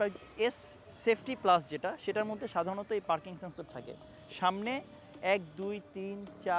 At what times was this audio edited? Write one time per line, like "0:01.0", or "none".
none